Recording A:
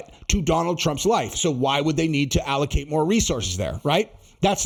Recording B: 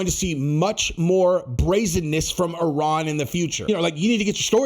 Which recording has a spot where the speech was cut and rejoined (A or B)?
B